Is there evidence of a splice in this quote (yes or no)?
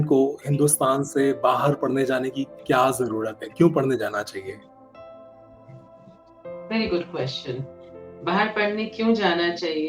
no